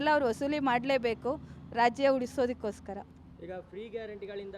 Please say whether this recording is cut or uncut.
uncut